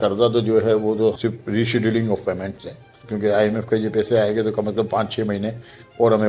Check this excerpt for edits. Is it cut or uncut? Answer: cut